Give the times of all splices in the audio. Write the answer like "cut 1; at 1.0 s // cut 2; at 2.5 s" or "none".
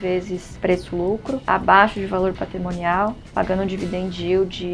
none

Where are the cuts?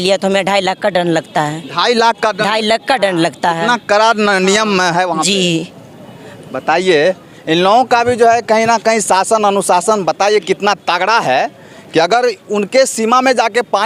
none

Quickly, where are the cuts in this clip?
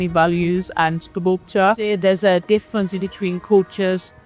cut 1; at 1.9 s

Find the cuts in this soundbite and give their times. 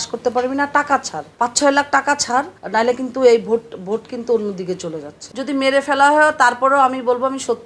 cut 1; at 1.2 s // cut 2; at 2.6 s // cut 3; at 5.1 s

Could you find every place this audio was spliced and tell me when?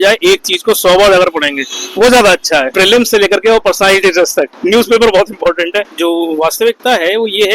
cut 1; at 2.7 s // cut 2; at 5.9 s

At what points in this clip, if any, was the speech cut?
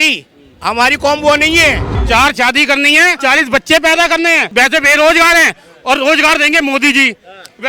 cut 1; at 1.9 s // cut 2; at 3.2 s // cut 3; at 4.4 s

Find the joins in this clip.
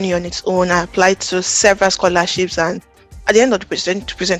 cut 1; at 2.8 s

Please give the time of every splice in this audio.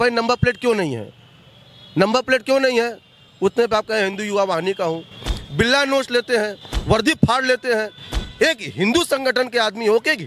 none

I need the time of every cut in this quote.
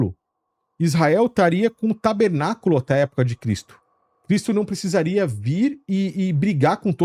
none

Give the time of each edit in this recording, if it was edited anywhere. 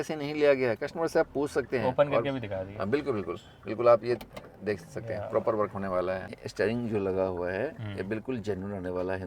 cut 1; at 6.3 s

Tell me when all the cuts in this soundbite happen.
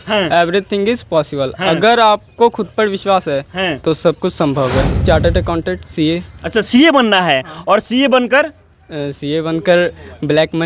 cut 1; at 5.0 s

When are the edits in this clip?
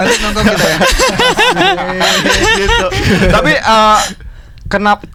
none

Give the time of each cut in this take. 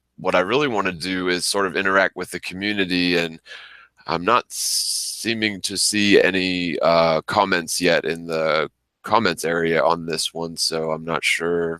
cut 1; at 9.2 s

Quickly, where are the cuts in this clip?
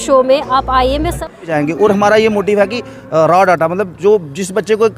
cut 1; at 1.5 s

